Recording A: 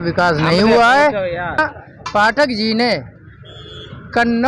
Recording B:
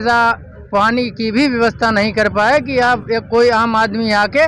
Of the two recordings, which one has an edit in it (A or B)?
A